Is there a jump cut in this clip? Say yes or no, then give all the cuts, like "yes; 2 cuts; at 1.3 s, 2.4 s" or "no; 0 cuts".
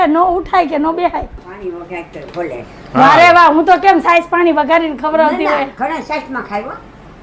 yes; 1 cut; at 1.4 s